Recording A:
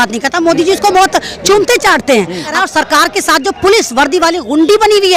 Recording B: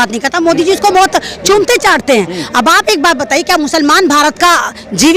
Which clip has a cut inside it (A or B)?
A